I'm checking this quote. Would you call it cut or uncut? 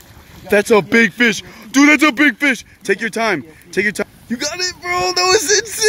cut